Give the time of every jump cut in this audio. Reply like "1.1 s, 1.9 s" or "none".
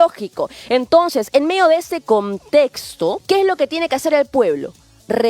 3.2 s